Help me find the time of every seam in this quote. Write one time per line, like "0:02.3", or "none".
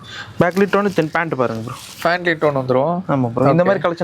none